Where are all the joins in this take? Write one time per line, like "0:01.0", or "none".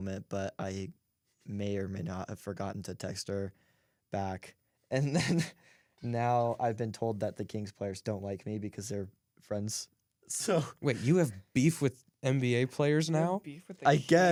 none